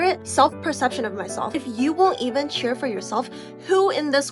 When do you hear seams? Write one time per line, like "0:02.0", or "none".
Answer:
0:01.6